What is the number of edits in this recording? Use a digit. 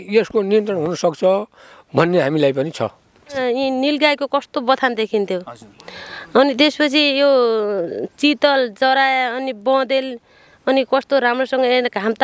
1